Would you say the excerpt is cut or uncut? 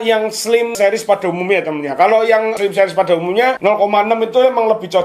cut